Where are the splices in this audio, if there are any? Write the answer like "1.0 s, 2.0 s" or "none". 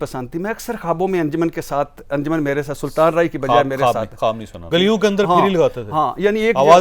4.6 s